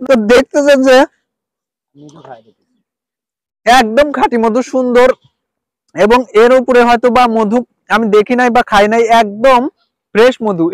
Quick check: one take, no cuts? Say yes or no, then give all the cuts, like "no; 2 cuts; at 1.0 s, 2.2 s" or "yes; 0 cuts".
yes; 0 cuts